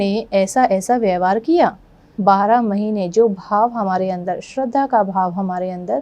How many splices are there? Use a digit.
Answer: 1